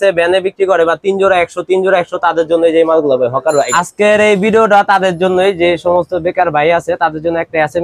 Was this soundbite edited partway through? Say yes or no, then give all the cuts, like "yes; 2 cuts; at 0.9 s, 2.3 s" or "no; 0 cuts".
yes; 1 cut; at 3.8 s